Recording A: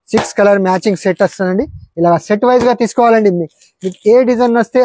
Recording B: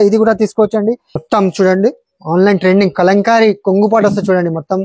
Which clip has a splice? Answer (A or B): B